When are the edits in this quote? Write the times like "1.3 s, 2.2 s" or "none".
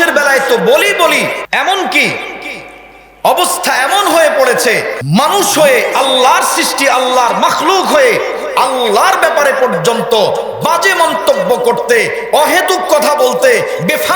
1.4 s, 5.0 s